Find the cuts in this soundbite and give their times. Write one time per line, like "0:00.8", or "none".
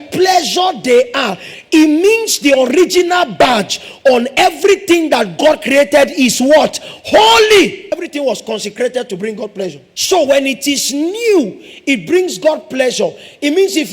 0:07.8
0:09.9